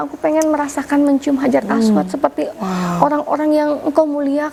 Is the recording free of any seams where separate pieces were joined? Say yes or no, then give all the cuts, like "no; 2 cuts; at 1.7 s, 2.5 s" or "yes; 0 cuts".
yes; 0 cuts